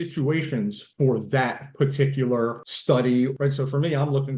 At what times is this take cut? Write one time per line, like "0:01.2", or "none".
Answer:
0:00.8
0:02.7
0:03.3